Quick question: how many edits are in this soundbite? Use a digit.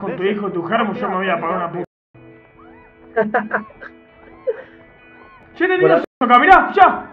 0